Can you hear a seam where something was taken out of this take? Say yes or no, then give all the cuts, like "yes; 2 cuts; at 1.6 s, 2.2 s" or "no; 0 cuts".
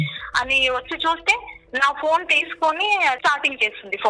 yes; 1 cut; at 3.2 s